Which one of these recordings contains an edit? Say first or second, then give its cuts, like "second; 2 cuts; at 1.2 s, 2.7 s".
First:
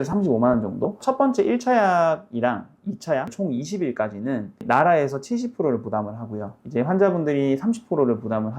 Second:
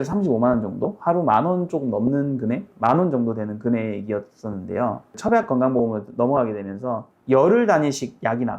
first; 1 cut; at 1.0 s